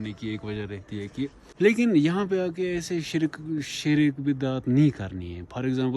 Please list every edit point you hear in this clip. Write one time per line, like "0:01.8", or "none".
0:01.4

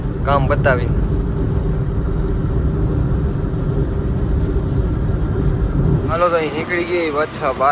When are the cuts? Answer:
0:06.1

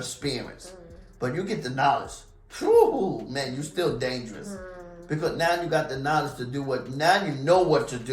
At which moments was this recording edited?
none

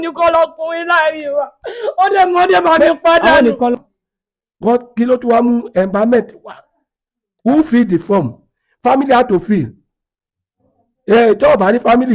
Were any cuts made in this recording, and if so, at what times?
0:03.7

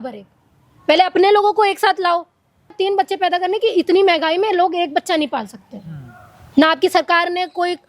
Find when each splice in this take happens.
0:02.8

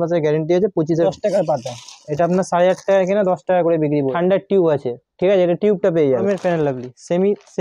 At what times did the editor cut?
0:01.1
0:04.1
0:06.2

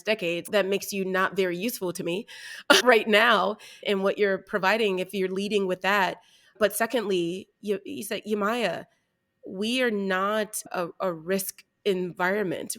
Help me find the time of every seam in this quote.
0:03.8

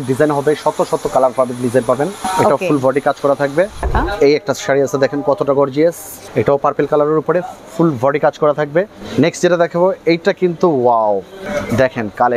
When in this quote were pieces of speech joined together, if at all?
0:02.2
0:03.9
0:06.1
0:09.0
0:11.4

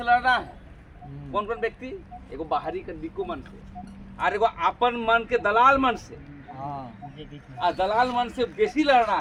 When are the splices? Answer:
none

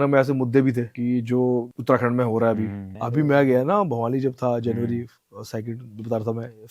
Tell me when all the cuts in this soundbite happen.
0:00.9
0:01.7
0:03.0

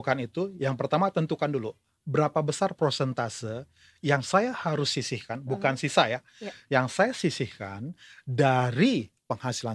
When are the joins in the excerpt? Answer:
none

